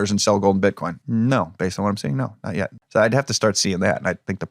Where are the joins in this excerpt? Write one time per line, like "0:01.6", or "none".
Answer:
0:00.9
0:02.8